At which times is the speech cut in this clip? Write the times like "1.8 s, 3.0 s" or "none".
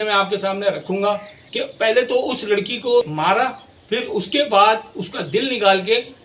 1.3 s, 3.0 s